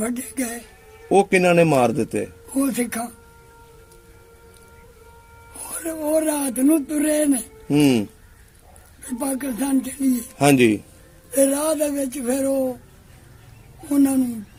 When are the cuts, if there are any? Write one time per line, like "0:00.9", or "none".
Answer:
none